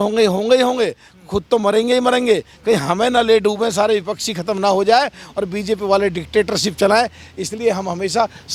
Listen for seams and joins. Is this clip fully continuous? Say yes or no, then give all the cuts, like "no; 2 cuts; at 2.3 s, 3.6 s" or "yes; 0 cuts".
yes; 0 cuts